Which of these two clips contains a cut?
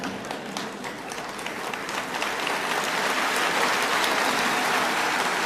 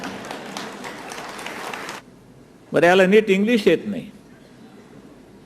second; 1 cut; at 1.9 s

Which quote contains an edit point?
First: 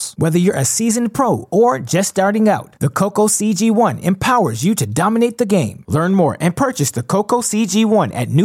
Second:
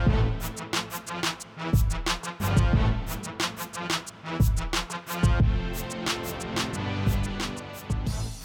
second; 2 cuts; at 5.6 s, 7.4 s

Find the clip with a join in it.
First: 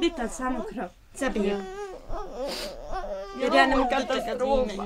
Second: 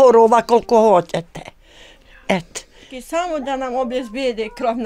second; 1 cut; at 2.9 s

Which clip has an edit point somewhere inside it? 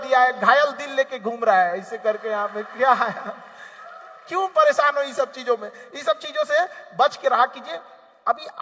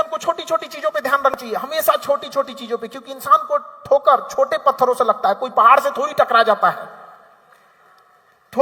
second; 1 cut; at 1.4 s

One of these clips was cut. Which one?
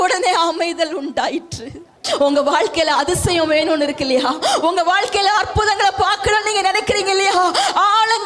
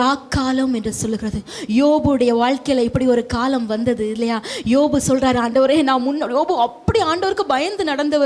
first; 1 cut; at 2.0 s

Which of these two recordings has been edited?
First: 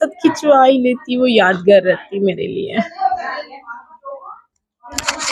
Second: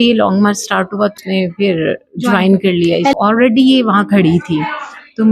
second; 2 cuts; at 1.2 s, 3.1 s

